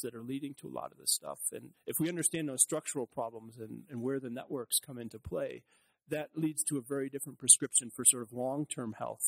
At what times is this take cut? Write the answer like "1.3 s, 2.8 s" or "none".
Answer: 1.7 s